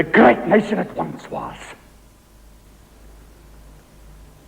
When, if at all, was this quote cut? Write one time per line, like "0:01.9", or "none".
0:02.7